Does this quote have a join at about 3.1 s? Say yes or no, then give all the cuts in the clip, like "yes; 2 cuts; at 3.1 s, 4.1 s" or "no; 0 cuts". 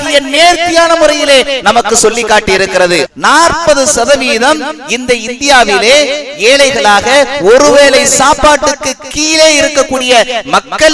yes; 1 cut; at 3.1 s